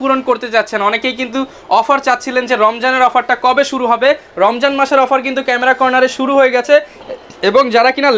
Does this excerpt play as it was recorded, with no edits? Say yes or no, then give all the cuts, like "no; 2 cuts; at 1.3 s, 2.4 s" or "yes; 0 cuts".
yes; 0 cuts